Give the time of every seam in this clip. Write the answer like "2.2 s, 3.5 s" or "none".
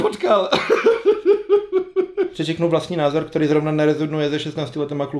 2.3 s